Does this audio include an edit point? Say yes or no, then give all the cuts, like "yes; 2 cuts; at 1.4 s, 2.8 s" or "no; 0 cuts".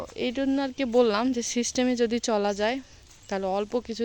no; 0 cuts